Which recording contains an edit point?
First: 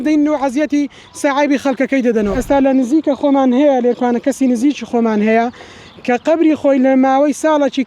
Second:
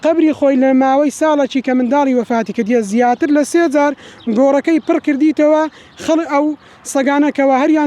first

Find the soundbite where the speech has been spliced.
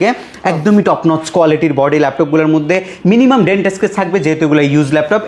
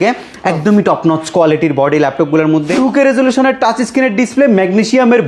second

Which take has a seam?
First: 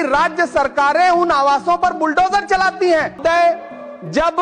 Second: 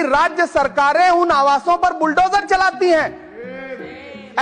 first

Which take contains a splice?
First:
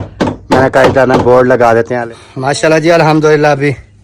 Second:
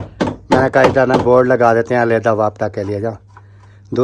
first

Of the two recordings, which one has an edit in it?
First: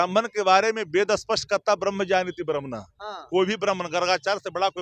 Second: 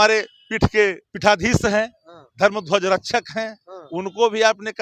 second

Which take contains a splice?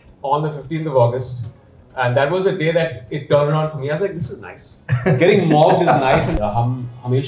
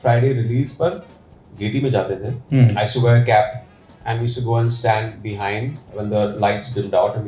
first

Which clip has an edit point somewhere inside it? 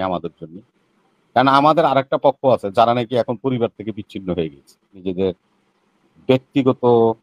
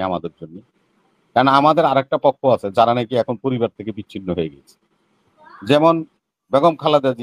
first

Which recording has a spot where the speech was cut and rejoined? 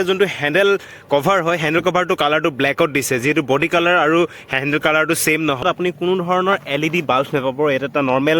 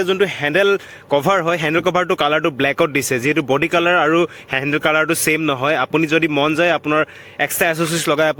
first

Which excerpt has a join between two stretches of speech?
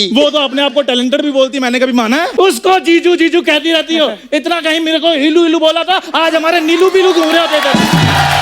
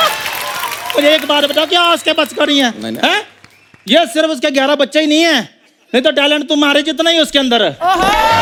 first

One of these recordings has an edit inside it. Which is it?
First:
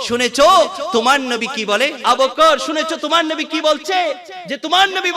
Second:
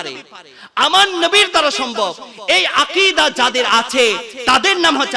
first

